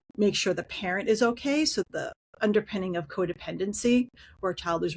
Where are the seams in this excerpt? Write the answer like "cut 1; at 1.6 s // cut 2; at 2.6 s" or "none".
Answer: cut 1; at 1.9 s